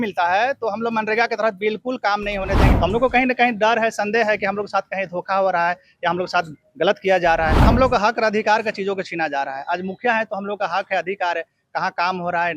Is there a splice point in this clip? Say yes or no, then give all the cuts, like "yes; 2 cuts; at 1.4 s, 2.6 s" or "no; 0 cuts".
yes; 2 cuts; at 2.7 s, 7.6 s